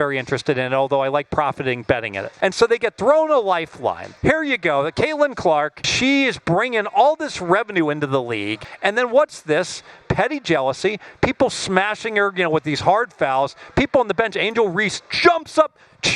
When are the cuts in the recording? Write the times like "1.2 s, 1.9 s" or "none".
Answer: 2.2 s, 4.1 s, 5.8 s, 8.6 s